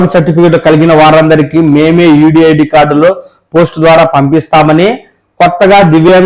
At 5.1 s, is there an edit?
no; 0 cuts

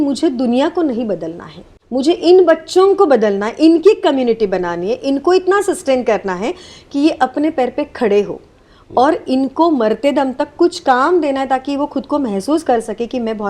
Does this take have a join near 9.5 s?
no; 1 cut; at 1.7 s

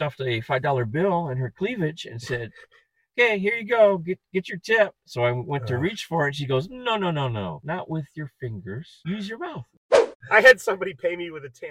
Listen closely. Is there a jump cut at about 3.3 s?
no; 4 cuts; at 1.9 s, 7.6 s, 8.9 s, 10.0 s

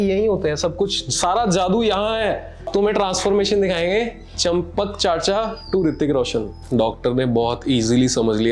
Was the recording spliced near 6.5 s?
yes; 2 cuts; at 2.7 s, 6.5 s

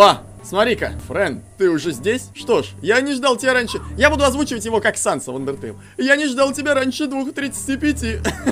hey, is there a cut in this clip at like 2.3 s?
yes; 2 cuts; at 1.0 s, 2.3 s

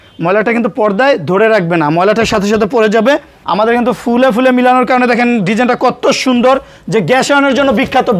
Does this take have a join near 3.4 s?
yes; 1 cut; at 3.4 s

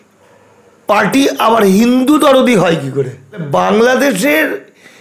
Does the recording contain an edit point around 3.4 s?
yes; 1 cut; at 3.4 s

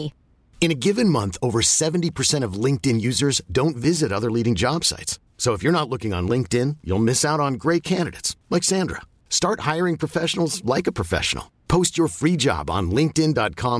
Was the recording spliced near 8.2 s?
no; 0 cuts

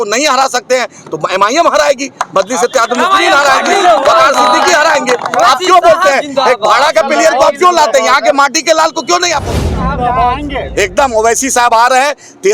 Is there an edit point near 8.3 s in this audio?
no; 1 cut; at 9.6 s

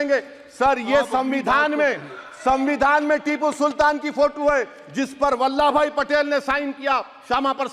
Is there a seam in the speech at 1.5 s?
no; 0 cuts

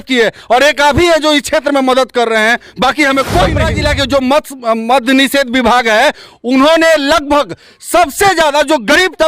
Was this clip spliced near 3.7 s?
yes; 1 cut; at 3.7 s

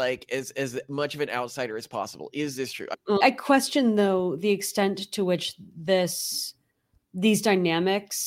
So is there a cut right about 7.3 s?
no; 1 cut; at 3.2 s

